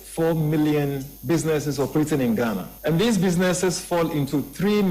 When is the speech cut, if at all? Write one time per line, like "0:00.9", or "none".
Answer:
0:01.1
0:02.7

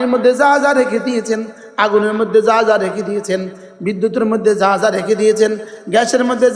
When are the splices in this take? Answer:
none

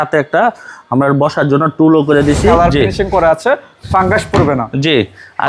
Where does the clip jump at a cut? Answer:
0:02.4

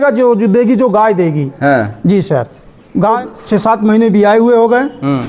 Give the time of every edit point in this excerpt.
0:03.1

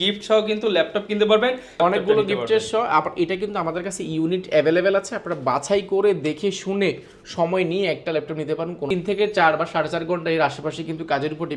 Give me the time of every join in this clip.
0:01.7
0:08.9

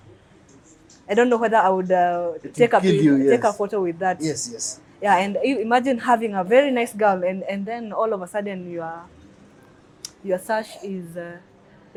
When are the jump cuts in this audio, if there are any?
none

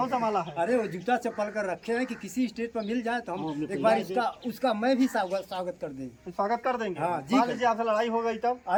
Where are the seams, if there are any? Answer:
none

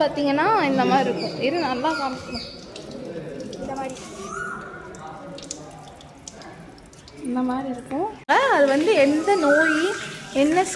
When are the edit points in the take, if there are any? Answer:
0:08.2

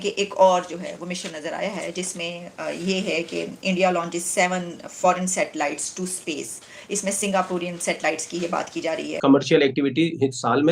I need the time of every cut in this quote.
0:09.1

